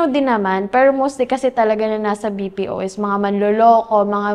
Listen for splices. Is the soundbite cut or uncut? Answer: uncut